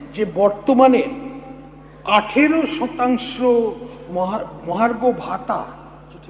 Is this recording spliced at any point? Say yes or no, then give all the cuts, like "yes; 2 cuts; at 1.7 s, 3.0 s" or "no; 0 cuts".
no; 0 cuts